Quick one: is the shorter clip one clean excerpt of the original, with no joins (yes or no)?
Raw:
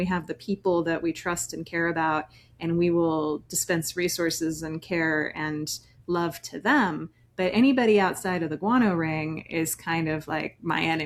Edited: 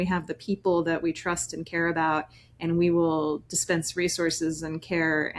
yes